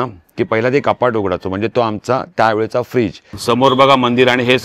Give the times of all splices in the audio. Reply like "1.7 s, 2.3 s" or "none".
3.3 s